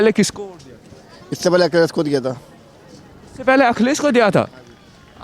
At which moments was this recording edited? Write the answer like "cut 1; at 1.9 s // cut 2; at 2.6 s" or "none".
none